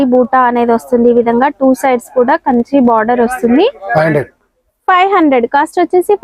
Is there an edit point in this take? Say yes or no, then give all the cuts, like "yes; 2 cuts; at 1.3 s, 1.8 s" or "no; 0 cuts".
yes; 1 cut; at 3.8 s